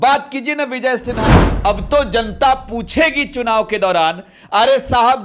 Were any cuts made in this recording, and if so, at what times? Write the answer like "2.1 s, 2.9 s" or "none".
1.2 s

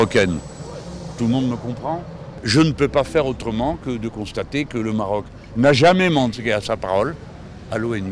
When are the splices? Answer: 2.4 s

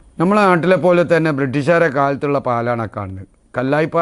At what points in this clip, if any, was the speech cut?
none

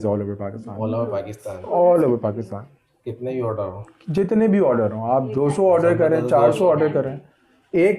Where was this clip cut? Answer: none

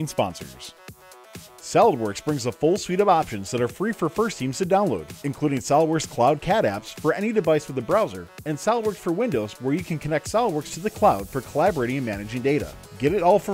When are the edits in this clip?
1.1 s

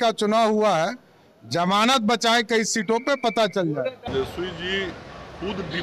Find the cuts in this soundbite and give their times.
4.1 s

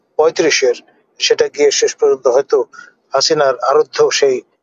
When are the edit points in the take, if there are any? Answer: none

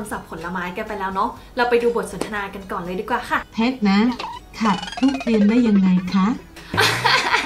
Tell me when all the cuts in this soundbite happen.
3.4 s

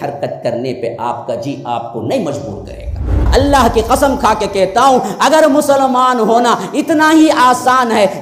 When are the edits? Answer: 3.3 s

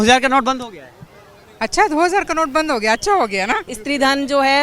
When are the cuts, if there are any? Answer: 3.7 s

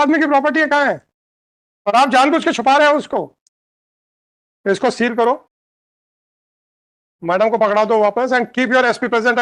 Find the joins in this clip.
none

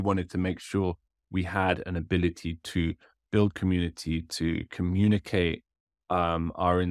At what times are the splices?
none

